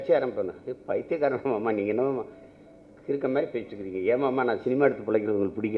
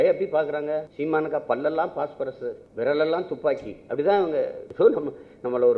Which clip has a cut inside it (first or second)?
second